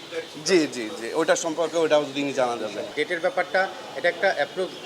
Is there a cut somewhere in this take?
yes; 1 cut; at 3.0 s

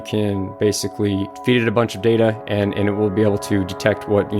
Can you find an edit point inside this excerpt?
yes; 1 cut; at 1.3 s

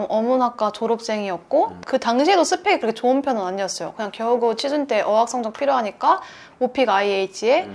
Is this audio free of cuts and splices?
no; 1 cut; at 1.8 s

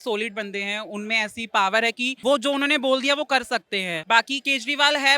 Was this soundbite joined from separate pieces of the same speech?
yes; 2 cuts; at 2.1 s, 4.0 s

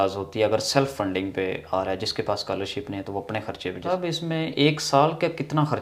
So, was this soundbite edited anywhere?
yes; 1 cut; at 3.8 s

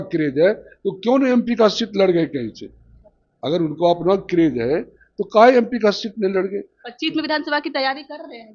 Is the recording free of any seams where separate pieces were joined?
yes; 0 cuts

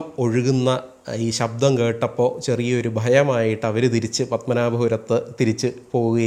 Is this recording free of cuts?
yes; 0 cuts

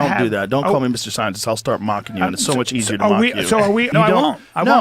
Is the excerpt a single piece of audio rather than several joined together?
no; 1 cut; at 3.9 s

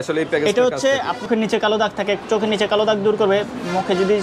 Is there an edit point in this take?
yes; 1 cut; at 1.3 s

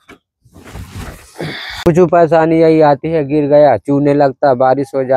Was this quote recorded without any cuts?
no; 1 cut; at 1.9 s

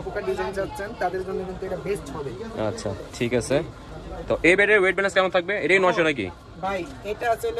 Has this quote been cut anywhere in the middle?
no; 0 cuts

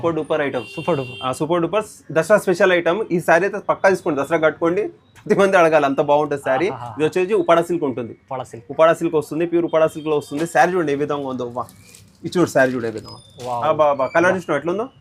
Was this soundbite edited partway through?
no; 0 cuts

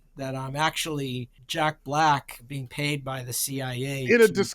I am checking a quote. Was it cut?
yes; 2 cuts; at 1.4 s, 2.5 s

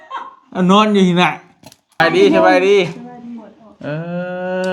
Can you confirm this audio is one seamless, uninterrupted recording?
no; 1 cut; at 2.0 s

